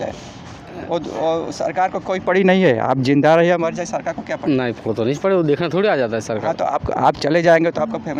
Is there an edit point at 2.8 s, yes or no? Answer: no